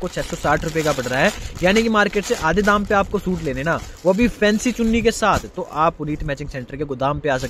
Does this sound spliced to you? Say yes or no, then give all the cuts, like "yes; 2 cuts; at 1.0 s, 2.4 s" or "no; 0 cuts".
no; 0 cuts